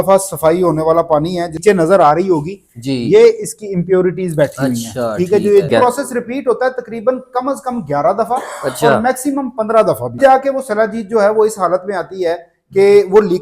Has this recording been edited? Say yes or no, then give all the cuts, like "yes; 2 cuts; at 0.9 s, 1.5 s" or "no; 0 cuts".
yes; 3 cuts; at 1.6 s, 5.7 s, 10.2 s